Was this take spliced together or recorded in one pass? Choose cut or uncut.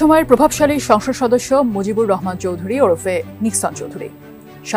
uncut